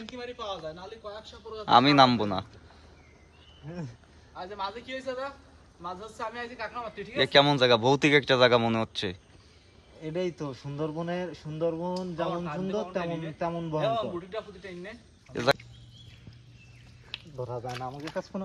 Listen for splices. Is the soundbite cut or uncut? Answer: cut